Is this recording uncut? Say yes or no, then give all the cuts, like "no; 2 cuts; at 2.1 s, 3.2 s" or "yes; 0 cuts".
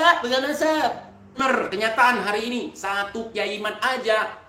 no; 1 cut; at 1.4 s